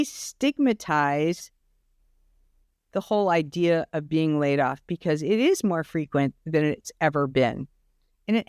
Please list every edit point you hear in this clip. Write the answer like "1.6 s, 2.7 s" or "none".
none